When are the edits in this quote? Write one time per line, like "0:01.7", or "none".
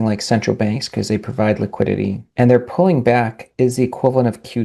0:02.2